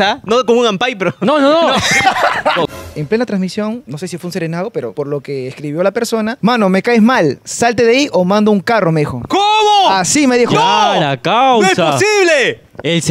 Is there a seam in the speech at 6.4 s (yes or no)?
yes